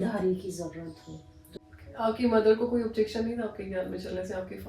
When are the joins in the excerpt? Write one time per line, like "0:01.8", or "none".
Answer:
0:01.9